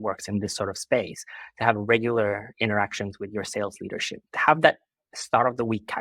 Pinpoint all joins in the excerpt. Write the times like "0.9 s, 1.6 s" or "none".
4.2 s